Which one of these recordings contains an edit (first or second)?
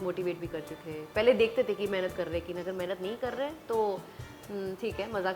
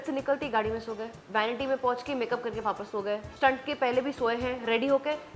second